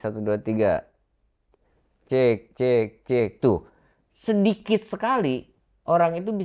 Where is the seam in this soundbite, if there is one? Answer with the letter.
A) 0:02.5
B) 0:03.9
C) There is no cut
C